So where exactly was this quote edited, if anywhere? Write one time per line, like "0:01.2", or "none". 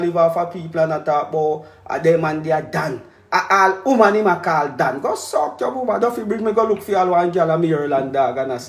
none